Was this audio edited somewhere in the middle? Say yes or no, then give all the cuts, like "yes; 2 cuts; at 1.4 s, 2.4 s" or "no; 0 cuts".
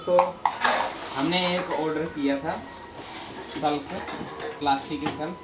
no; 0 cuts